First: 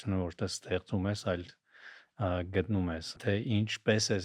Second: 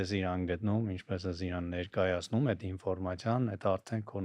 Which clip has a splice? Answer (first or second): first